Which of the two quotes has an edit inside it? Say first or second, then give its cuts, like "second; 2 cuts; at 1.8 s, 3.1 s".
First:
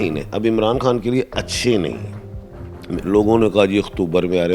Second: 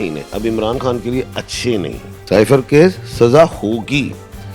second; 1 cut; at 2.1 s